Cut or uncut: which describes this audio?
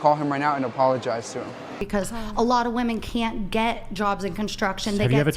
cut